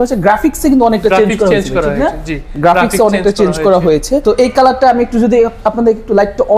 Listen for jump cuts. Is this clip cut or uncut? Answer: cut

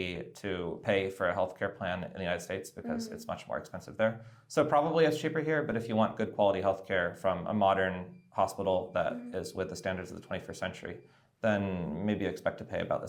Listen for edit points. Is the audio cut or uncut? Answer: uncut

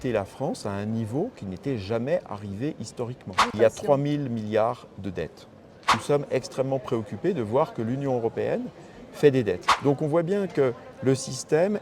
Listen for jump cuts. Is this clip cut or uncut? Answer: cut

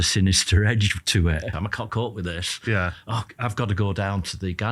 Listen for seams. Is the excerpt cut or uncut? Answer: cut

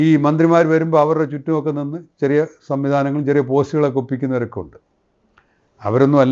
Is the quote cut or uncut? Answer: uncut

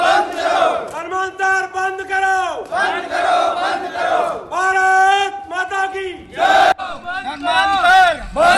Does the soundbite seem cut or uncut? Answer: uncut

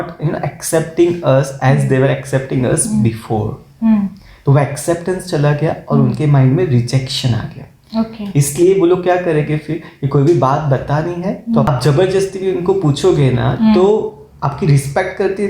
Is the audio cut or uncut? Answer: cut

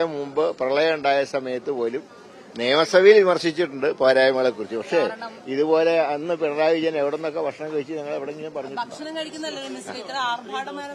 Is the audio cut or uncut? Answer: uncut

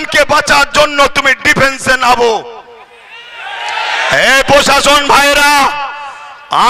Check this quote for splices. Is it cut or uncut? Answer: uncut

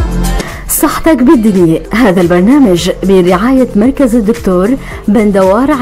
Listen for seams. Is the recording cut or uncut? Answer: cut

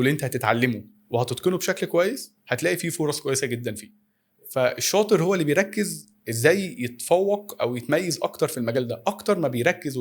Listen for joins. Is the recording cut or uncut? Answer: uncut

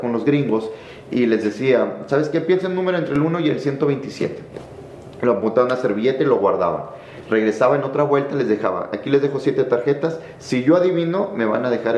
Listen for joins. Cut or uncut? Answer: uncut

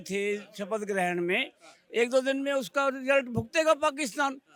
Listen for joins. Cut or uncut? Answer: uncut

